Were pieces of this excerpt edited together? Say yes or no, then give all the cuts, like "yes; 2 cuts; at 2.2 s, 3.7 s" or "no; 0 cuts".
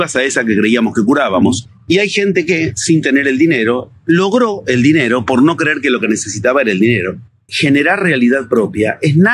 yes; 2 cuts; at 1.6 s, 7.5 s